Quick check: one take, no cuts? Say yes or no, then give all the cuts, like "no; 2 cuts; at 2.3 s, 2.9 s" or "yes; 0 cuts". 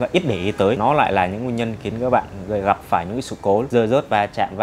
no; 2 cuts; at 0.8 s, 3.7 s